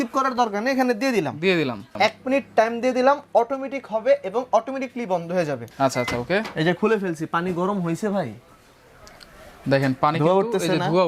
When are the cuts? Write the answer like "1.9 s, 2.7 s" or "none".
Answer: 1.9 s, 5.6 s